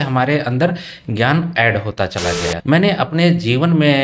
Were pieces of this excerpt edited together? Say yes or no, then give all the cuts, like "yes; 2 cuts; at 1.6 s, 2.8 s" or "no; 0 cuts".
yes; 1 cut; at 2.5 s